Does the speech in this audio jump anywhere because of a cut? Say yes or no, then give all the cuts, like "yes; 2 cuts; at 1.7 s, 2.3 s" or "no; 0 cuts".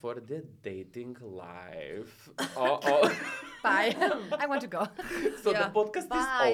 no; 0 cuts